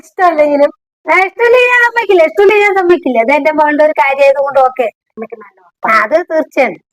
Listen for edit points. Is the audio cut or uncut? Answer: cut